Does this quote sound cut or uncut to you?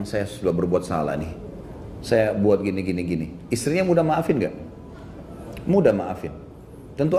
uncut